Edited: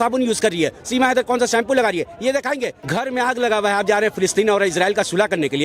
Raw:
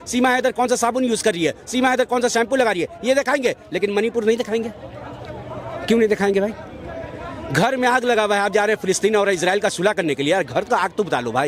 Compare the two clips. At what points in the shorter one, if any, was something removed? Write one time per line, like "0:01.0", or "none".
0:02.8